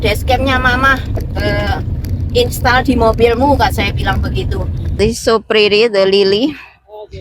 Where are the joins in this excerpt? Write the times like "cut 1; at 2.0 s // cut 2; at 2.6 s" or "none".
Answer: cut 1; at 5.0 s